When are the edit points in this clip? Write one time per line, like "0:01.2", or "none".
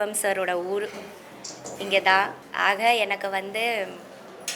0:02.4